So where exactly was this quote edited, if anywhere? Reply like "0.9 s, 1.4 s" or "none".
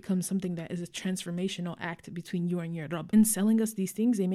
3.0 s